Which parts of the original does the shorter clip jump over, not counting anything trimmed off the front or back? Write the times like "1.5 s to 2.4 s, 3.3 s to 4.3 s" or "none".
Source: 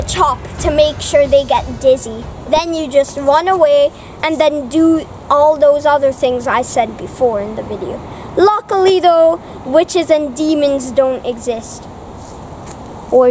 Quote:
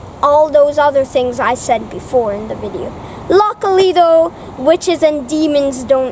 none